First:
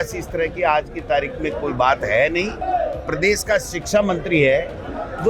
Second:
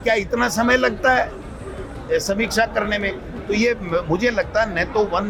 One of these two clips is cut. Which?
first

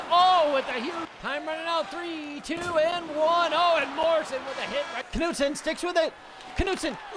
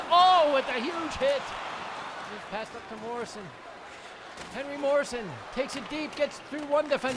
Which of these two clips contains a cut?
first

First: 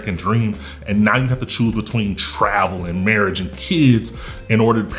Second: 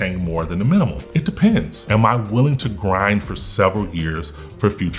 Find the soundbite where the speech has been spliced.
second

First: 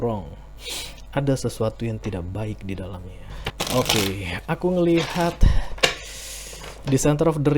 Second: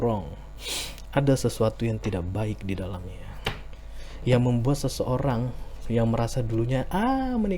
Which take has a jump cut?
first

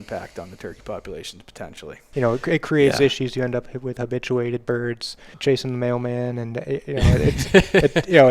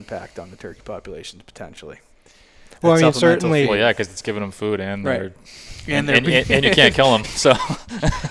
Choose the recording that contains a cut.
first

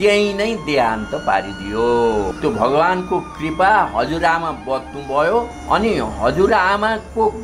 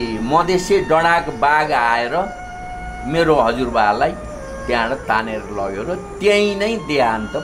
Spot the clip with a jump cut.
first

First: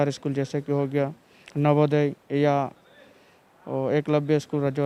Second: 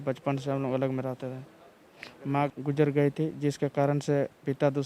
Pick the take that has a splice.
second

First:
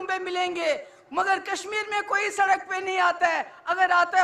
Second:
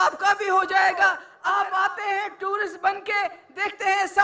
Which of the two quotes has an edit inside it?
second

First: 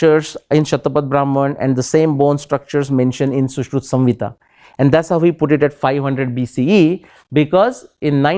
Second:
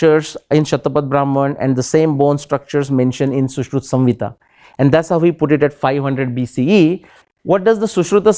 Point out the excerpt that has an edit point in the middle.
second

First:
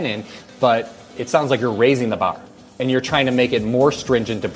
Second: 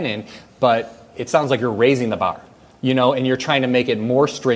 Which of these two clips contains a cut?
first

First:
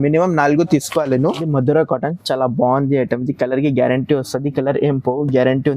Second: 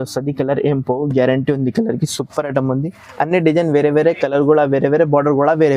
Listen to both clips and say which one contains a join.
first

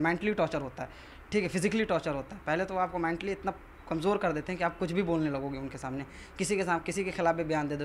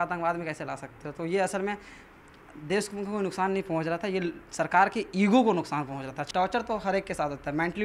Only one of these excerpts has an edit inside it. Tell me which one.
second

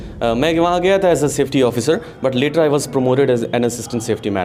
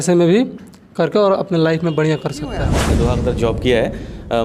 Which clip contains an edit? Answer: second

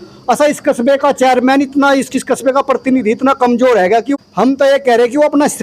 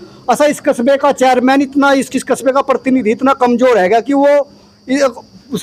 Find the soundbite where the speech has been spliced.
first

